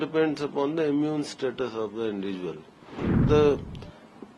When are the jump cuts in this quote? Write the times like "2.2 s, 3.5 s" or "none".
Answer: 3.1 s